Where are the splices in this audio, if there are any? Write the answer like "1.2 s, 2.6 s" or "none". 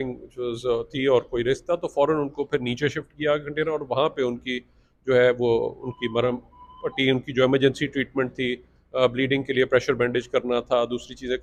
none